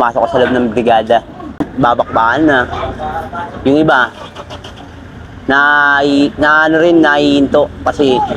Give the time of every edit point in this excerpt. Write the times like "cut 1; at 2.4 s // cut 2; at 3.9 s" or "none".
cut 1; at 1.7 s